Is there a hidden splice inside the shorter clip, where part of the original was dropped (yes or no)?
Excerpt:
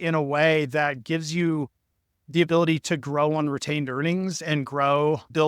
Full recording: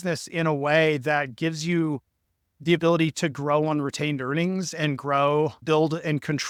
no